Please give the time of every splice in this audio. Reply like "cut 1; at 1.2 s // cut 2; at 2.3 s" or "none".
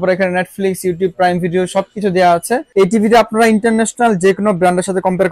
cut 1; at 2.7 s